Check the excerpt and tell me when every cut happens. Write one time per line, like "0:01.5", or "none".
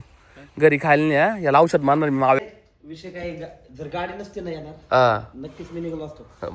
0:02.4